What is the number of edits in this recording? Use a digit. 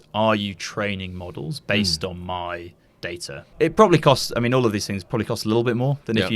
1